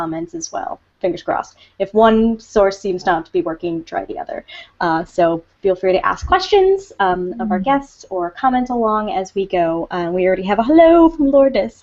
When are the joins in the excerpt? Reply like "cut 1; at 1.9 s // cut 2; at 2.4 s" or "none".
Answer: cut 1; at 8.4 s